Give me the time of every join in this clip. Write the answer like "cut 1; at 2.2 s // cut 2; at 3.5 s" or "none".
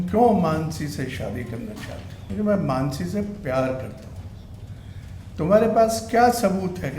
cut 1; at 2.1 s